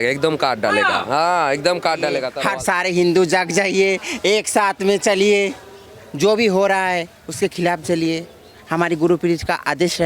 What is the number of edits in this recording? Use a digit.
1